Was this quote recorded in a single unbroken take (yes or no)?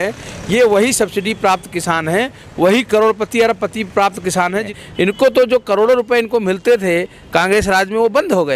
no